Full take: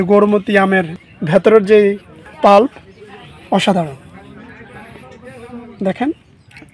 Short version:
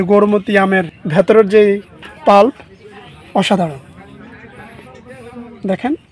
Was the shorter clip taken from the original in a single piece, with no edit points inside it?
no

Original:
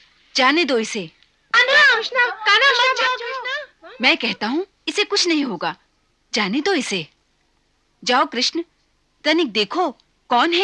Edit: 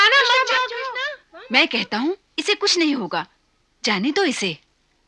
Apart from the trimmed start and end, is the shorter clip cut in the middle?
no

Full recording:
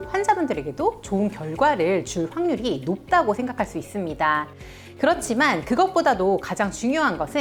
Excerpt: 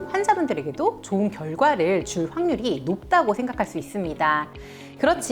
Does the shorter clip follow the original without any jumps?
yes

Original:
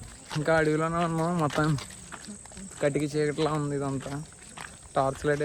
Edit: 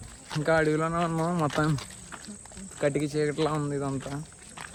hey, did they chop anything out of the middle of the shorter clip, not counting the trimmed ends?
no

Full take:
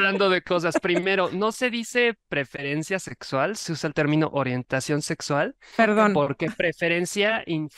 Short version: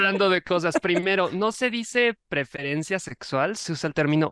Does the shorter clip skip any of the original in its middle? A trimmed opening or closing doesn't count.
no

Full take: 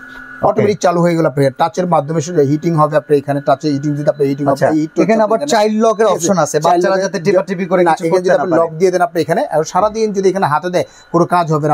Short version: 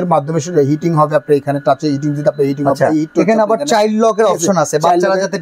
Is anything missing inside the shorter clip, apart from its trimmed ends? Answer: no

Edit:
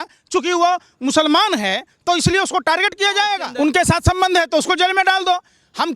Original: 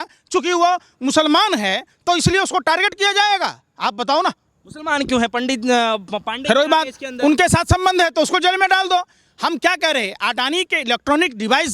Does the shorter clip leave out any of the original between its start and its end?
yes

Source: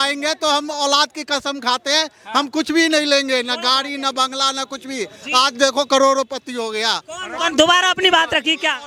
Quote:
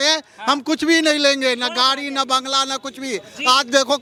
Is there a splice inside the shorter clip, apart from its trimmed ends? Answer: no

